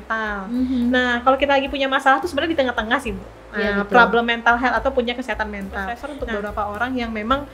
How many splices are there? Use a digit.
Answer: 1